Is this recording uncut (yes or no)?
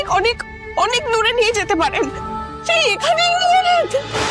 no